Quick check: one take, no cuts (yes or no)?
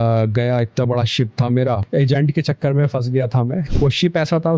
no